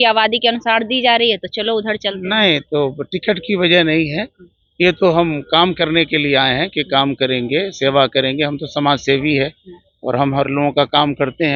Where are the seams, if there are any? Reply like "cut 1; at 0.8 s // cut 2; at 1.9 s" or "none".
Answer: none